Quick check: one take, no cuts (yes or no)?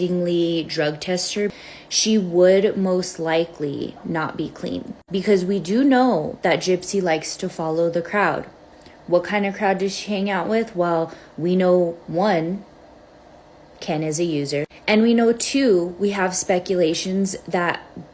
no